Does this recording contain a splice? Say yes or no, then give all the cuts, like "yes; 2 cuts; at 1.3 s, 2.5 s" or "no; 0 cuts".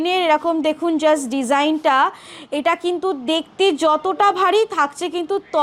no; 0 cuts